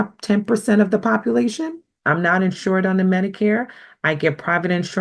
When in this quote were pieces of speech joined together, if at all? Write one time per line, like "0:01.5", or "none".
0:02.0